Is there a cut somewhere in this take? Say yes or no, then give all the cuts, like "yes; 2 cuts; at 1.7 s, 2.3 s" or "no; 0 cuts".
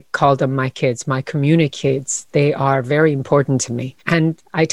no; 0 cuts